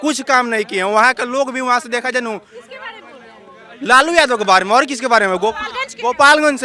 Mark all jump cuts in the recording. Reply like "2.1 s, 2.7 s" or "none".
none